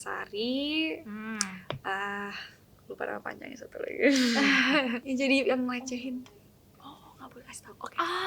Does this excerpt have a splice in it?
yes; 1 cut; at 5.0 s

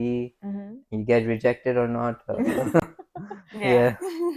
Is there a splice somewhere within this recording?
no; 0 cuts

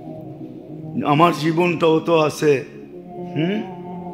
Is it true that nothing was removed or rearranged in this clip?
yes; 0 cuts

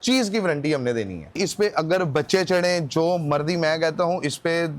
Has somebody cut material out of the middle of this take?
yes; 1 cut; at 1.3 s

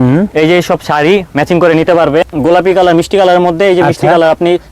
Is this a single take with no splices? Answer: no; 1 cut; at 2.3 s

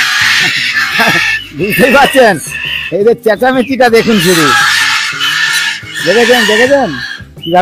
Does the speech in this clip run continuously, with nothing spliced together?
yes; 0 cuts

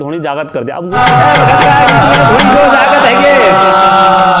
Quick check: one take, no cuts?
no; 1 cut; at 1.0 s

